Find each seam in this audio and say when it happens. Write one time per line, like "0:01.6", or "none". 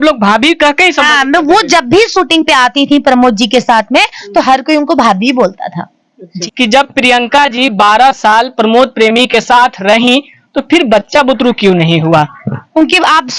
0:06.3